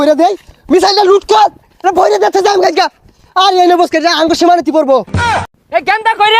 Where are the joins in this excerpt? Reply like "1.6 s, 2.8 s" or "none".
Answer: 5.4 s